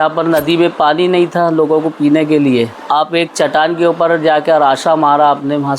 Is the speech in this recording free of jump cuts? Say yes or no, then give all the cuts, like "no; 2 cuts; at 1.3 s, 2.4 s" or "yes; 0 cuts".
no; 1 cut; at 2.8 s